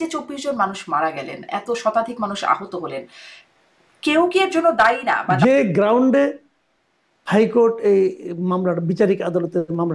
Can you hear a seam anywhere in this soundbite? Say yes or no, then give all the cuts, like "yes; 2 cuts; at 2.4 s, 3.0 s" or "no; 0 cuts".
yes; 1 cut; at 5.4 s